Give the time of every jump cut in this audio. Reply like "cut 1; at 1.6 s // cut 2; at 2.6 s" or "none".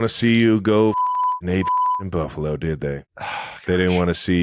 cut 1; at 3.1 s